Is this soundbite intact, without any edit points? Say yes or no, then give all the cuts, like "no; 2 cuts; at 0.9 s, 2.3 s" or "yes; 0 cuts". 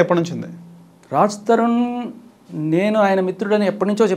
yes; 0 cuts